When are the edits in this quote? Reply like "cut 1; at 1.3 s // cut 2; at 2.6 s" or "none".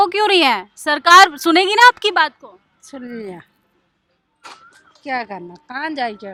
none